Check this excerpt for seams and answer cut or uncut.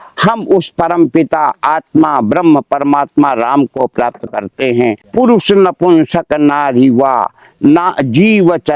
cut